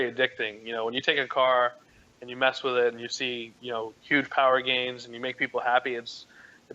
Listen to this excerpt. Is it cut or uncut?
uncut